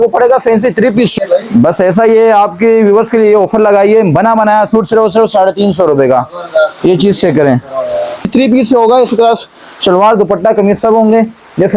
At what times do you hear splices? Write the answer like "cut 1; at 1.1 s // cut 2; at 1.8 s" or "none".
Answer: cut 1; at 1.1 s // cut 2; at 8.3 s